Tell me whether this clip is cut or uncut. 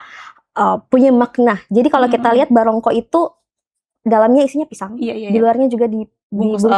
uncut